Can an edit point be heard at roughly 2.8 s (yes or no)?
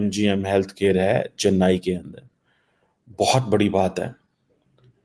no